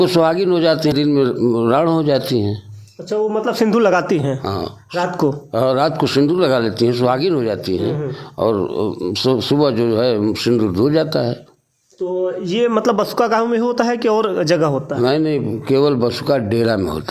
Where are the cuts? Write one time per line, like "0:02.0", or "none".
0:00.9